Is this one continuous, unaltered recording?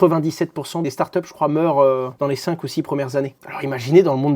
yes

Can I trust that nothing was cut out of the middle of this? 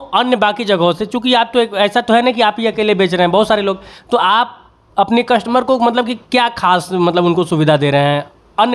yes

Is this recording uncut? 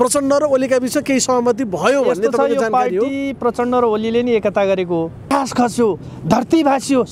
no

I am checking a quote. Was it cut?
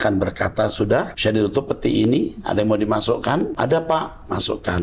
yes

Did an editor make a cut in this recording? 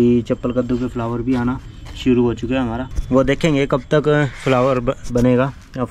no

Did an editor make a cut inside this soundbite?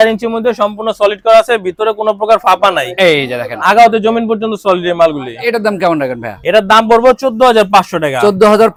no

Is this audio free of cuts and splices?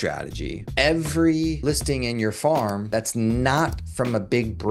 yes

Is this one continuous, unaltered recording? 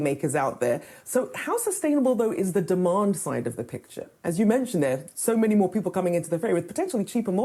yes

